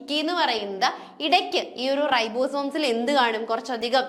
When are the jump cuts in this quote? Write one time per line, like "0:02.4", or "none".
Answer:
none